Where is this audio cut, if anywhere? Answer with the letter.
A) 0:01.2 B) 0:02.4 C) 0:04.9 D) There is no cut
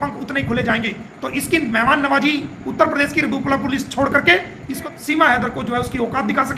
C